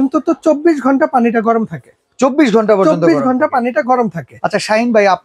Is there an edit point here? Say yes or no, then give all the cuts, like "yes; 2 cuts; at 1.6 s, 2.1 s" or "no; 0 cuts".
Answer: no; 0 cuts